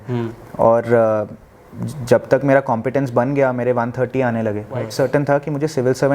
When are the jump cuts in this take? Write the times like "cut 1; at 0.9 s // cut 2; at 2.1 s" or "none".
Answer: cut 1; at 4.9 s